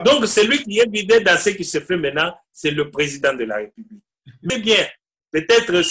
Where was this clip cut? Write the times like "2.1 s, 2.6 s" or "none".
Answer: 4.4 s

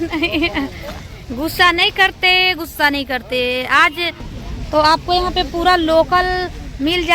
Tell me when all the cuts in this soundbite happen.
4.2 s

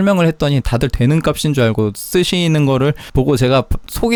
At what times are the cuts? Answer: none

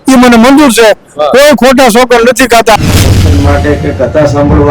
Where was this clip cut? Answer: 3.1 s

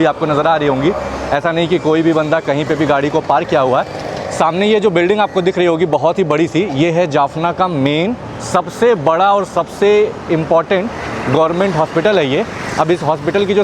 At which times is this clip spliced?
none

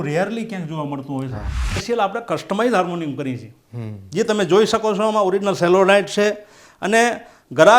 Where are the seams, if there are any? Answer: 1.8 s

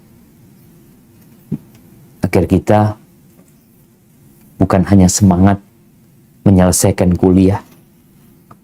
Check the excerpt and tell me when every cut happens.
none

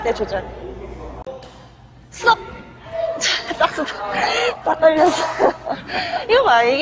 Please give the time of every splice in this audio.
1.2 s

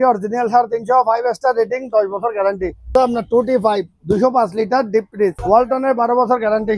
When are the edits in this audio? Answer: 2.9 s, 5.4 s

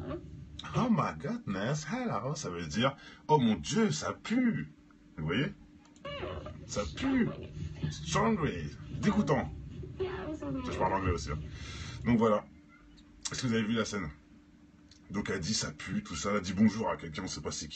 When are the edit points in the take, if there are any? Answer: none

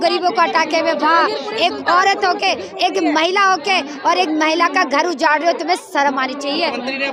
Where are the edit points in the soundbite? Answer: none

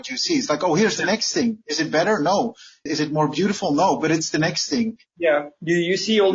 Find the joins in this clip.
5.0 s

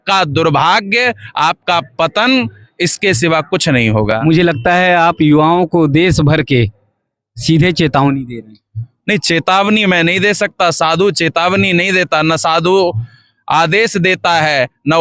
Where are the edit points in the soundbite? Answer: none

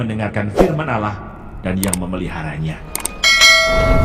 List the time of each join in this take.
none

